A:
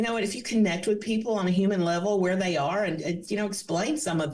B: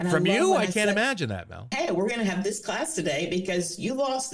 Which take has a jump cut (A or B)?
B